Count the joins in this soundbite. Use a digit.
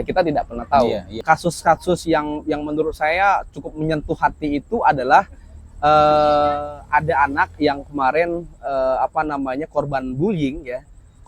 1